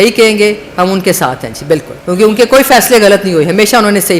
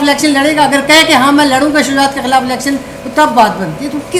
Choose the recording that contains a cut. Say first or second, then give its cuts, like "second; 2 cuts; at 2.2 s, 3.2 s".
first; 1 cut; at 1.9 s